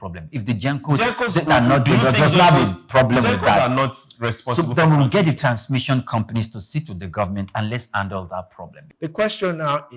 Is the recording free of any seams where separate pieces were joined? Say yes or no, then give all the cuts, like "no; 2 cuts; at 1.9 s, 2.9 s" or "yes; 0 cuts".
no; 1 cut; at 8.9 s